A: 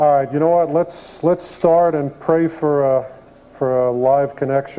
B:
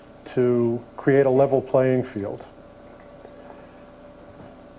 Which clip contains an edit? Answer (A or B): B